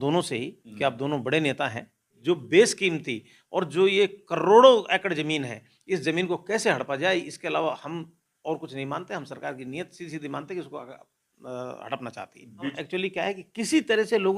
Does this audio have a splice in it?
yes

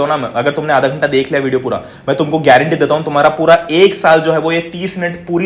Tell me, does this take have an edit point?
no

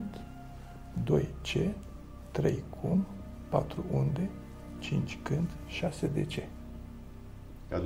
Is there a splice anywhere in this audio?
no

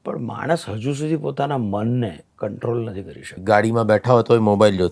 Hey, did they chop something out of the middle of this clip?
yes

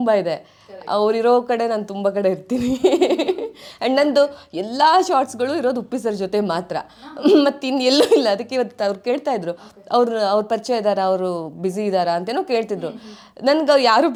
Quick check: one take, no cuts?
yes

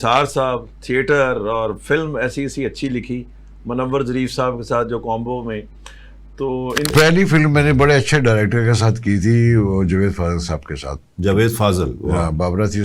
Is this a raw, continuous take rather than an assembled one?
no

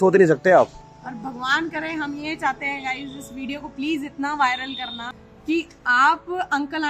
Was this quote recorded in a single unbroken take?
yes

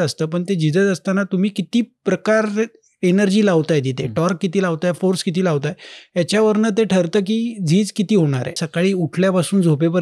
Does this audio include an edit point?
yes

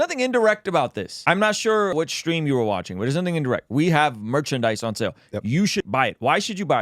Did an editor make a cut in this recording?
yes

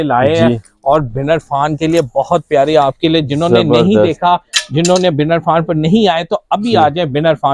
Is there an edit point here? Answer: no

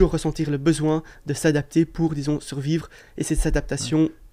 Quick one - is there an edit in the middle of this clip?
no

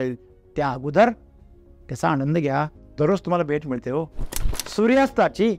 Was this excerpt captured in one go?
no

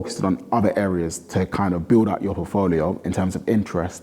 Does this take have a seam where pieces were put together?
no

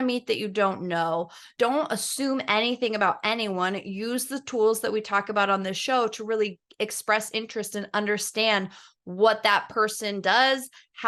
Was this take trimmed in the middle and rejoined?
no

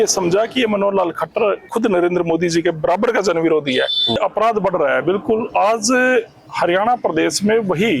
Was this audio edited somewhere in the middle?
yes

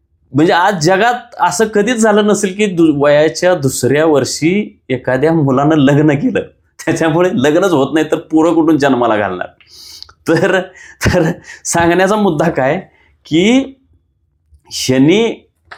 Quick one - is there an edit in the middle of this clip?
no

